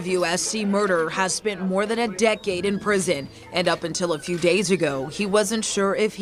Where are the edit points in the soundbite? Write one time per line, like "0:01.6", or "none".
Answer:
none